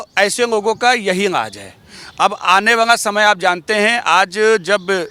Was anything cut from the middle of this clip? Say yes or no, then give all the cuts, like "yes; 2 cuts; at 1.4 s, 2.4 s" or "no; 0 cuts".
no; 0 cuts